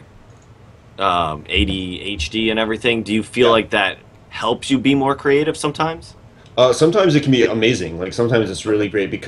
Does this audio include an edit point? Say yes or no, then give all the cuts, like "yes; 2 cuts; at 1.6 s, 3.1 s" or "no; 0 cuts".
yes; 1 cut; at 5.4 s